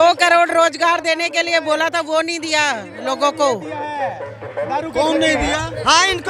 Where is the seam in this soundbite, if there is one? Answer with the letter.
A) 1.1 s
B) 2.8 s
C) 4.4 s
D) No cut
D